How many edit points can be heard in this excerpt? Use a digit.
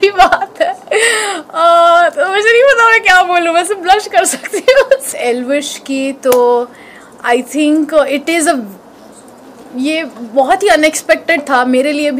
1